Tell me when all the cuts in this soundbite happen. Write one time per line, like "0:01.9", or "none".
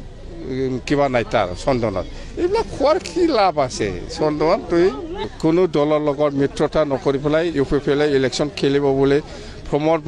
0:05.3